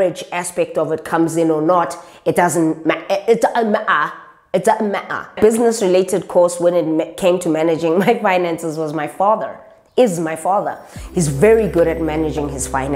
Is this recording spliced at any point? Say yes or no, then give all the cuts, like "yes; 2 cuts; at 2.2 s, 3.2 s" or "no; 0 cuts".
yes; 1 cut; at 5.4 s